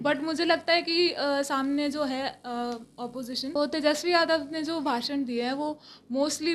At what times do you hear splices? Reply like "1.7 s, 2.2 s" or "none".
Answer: 3.6 s

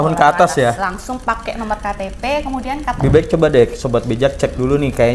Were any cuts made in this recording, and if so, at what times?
3.0 s

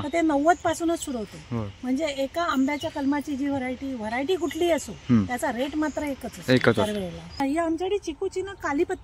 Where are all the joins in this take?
7.4 s

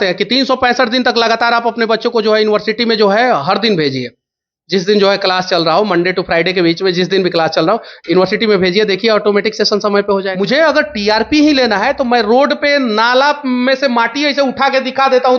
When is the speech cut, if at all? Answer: 10.3 s

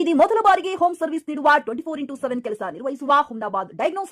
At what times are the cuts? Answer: none

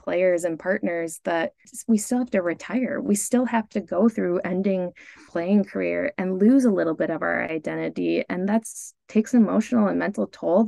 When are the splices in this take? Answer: 1.7 s, 5.3 s

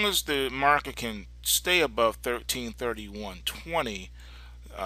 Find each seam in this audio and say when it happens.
3.7 s

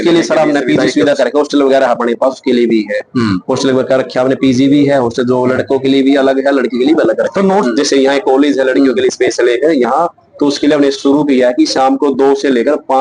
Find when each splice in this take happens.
7.7 s

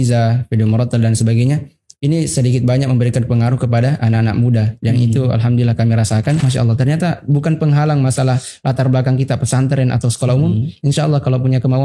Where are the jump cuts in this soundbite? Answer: 6.5 s

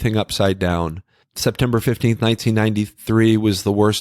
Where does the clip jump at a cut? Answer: 1.2 s

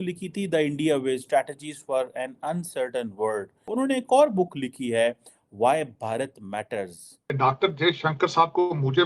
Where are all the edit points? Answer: 3.7 s, 7.3 s

